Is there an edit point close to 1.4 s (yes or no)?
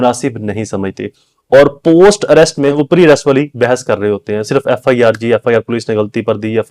no